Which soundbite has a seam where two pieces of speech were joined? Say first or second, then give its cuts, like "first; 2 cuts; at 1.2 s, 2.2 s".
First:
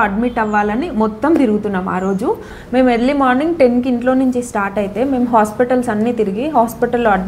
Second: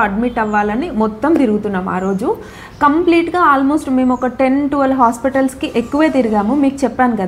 first; 1 cut; at 2.6 s